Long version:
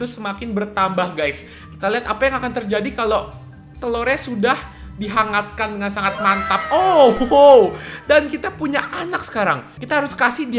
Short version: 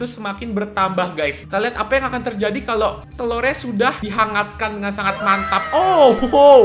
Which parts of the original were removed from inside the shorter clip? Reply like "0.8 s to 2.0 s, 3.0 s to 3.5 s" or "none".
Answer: 1.4 s to 1.7 s, 3.4 s to 3.7 s, 4.7 s to 5.0 s